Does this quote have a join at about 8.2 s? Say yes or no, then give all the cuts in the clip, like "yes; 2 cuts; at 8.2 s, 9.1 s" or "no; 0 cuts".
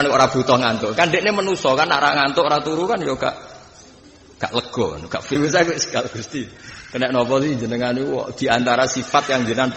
no; 1 cut; at 5.3 s